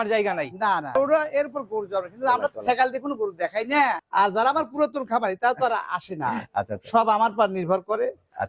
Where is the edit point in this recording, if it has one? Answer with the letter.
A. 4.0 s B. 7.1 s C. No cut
A